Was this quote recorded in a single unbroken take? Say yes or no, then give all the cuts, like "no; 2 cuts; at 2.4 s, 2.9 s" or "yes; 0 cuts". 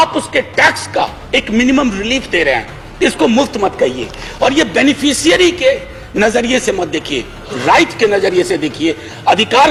yes; 0 cuts